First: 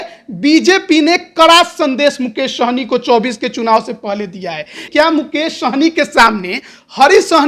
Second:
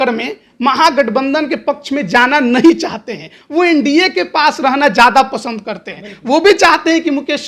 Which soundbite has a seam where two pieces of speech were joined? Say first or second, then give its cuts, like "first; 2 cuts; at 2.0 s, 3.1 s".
first; 1 cut; at 4.9 s